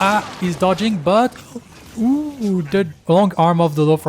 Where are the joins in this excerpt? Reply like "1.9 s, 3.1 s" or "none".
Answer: 3.0 s

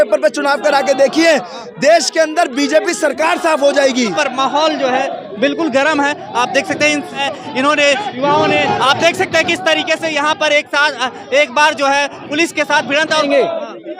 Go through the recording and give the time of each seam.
4.1 s, 7.2 s, 13.2 s

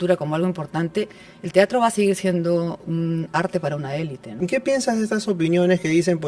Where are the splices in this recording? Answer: 2.8 s, 4.2 s

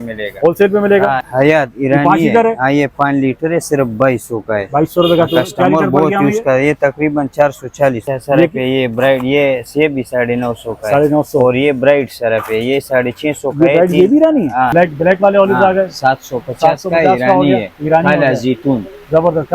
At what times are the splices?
1.2 s, 8.1 s, 14.7 s

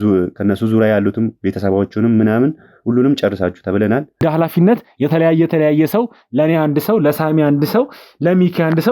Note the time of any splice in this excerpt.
4.2 s

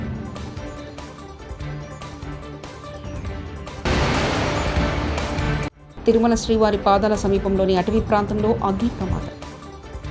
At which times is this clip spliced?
9.2 s

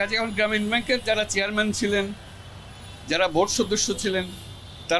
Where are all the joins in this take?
none

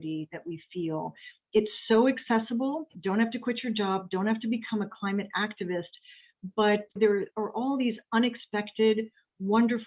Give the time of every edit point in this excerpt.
2.9 s, 7.0 s

